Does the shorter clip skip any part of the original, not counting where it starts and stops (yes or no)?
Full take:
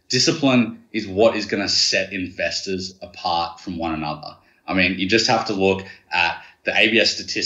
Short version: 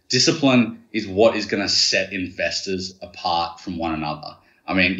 no